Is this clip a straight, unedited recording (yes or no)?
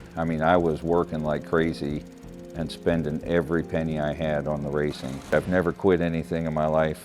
no